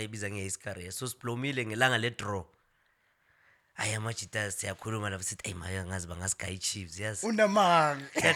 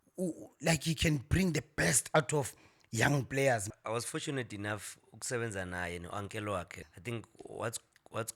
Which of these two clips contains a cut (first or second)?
second